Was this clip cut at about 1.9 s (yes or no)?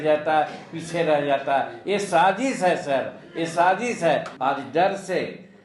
no